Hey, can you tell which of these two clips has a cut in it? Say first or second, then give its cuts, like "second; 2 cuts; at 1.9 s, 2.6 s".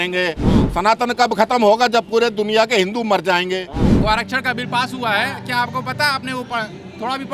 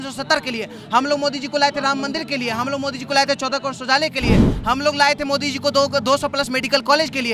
first; 1 cut; at 3.8 s